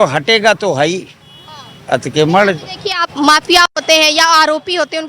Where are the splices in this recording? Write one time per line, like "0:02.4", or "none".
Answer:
none